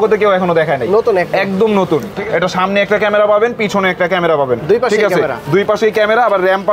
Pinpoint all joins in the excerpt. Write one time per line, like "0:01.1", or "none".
0:02.1